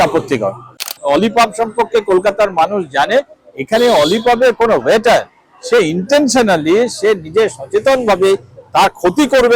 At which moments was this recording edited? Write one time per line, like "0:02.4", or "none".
0:00.9

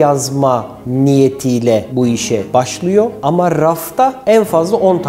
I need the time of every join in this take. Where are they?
none

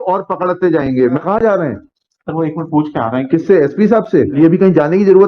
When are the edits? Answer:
0:01.2
0:04.3

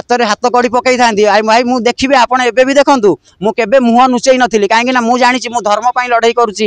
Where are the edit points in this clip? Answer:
none

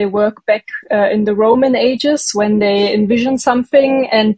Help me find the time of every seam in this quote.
none

